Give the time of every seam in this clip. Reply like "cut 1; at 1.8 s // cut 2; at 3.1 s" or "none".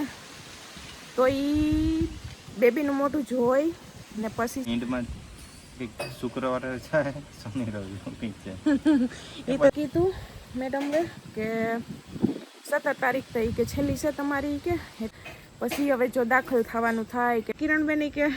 cut 1; at 4.7 s // cut 2; at 9.7 s // cut 3; at 15.1 s // cut 4; at 17.5 s

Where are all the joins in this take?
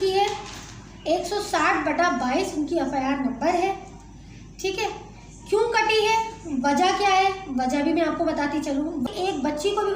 cut 1; at 9.1 s

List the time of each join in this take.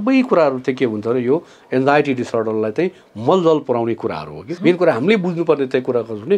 cut 1; at 4.5 s

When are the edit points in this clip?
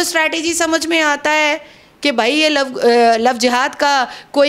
none

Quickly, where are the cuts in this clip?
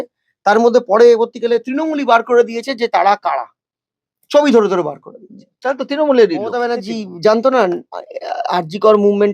cut 1; at 6.8 s

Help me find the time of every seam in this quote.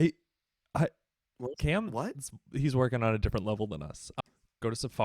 cut 1; at 4.1 s

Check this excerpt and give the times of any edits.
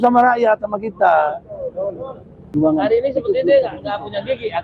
cut 1; at 2.6 s

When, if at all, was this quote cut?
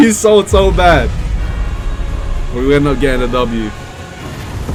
none

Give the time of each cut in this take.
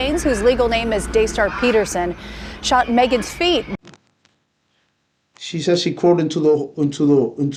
none

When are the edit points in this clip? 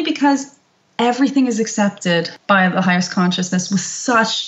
cut 1; at 2.3 s

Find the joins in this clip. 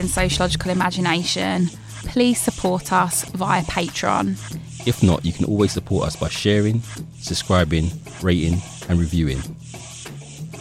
cut 1; at 9.4 s

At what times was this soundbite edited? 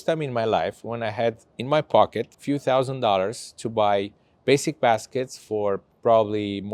none

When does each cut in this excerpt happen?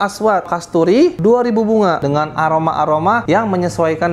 cut 1; at 1.1 s // cut 2; at 2.0 s // cut 3; at 3.2 s

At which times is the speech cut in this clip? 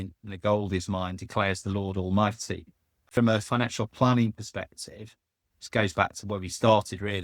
cut 1; at 3.0 s

